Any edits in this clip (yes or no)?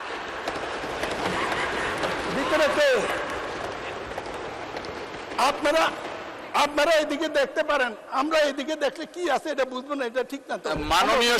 no